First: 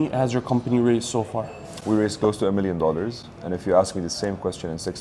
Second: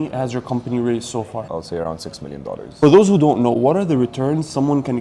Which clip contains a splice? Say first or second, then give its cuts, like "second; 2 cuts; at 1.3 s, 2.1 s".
second; 2 cuts; at 1.5 s, 2.8 s